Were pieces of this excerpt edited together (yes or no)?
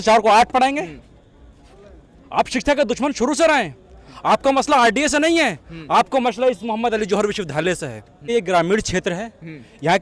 yes